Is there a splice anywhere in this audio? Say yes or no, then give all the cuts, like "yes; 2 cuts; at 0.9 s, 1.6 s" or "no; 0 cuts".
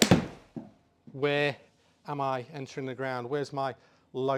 no; 0 cuts